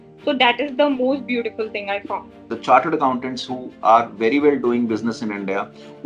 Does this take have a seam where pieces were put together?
yes; 1 cut; at 2.5 s

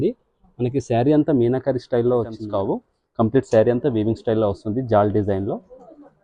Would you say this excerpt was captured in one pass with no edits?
no; 1 cut; at 2.4 s

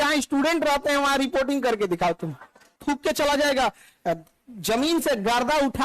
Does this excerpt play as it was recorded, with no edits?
no; 1 cut; at 2.8 s

